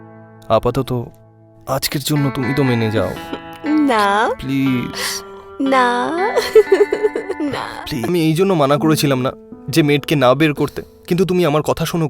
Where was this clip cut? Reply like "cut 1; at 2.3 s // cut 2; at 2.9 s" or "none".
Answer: cut 1; at 8.1 s